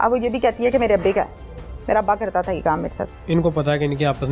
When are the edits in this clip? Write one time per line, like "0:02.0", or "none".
0:03.2